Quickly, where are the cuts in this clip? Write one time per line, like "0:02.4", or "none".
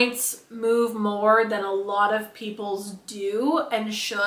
none